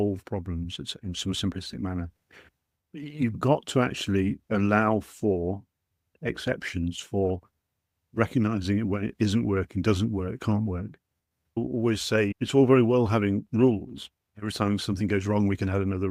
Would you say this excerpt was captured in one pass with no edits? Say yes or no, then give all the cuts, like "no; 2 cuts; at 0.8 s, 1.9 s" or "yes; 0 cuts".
yes; 0 cuts